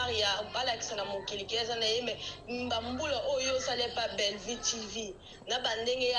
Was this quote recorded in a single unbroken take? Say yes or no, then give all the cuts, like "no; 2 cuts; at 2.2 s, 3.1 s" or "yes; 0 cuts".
yes; 0 cuts